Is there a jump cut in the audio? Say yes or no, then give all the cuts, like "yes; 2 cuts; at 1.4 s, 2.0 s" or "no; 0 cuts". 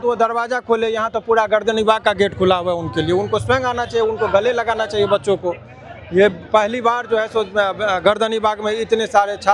no; 0 cuts